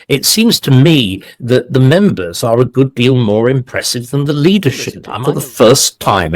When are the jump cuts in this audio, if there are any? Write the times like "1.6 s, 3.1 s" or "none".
5.0 s